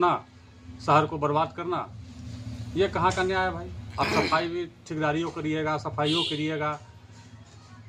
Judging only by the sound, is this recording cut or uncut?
uncut